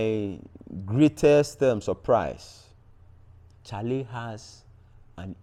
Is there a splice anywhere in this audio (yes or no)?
no